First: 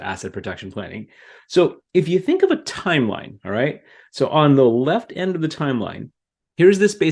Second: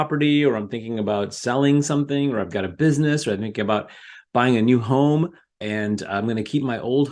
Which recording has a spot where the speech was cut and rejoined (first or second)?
second